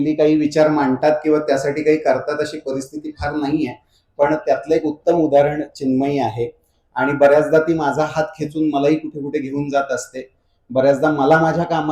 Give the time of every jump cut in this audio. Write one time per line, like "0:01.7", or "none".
none